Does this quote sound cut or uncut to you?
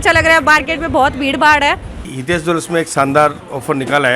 cut